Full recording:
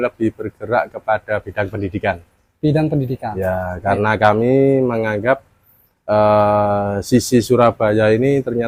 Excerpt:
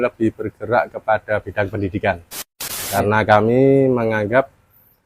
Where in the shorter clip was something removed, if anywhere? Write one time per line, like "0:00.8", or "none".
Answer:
0:02.6